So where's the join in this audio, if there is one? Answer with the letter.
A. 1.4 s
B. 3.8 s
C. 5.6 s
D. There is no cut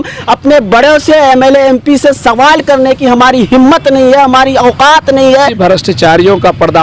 C